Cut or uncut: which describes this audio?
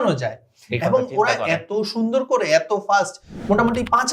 uncut